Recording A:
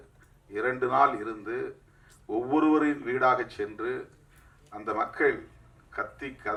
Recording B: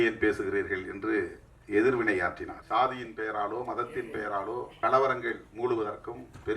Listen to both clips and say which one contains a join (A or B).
B